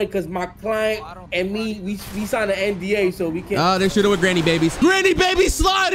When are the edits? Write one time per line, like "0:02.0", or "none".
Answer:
0:04.8